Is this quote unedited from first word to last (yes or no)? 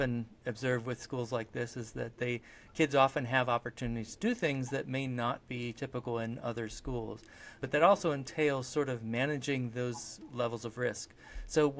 no